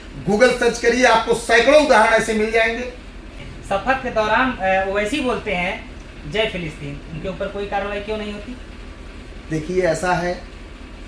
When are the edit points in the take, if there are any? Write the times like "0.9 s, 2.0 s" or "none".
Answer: 3.4 s